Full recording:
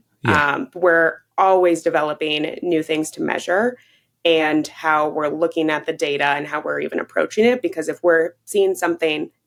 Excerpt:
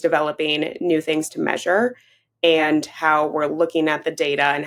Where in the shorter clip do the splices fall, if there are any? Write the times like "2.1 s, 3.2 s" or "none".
none